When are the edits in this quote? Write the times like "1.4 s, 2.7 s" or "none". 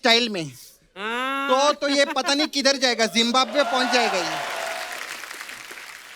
4.7 s